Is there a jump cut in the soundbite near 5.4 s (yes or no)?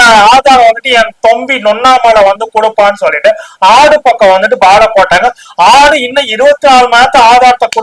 no